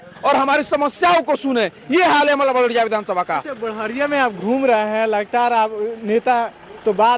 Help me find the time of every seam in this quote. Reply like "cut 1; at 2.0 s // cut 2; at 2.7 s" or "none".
none